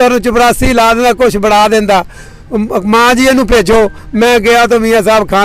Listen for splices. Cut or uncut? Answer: uncut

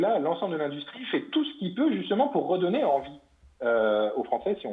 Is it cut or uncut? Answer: uncut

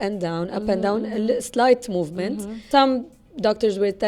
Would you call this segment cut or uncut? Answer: cut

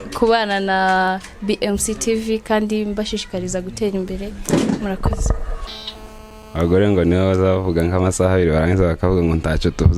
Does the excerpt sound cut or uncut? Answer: cut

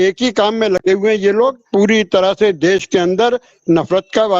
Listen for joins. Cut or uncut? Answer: cut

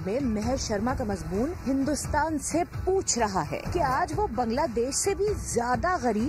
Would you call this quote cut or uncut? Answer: uncut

